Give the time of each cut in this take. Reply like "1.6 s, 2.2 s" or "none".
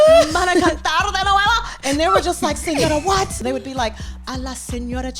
3.4 s